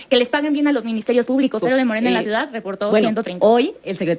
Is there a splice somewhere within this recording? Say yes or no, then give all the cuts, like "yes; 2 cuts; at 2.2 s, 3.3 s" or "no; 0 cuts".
yes; 1 cut; at 1.6 s